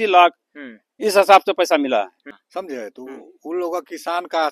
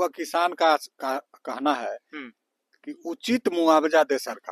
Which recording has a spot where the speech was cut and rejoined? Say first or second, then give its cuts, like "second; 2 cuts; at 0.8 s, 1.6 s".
first; 1 cut; at 2.3 s